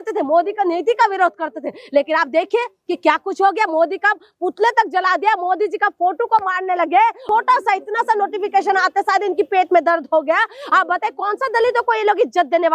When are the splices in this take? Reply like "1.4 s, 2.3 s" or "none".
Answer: 7.2 s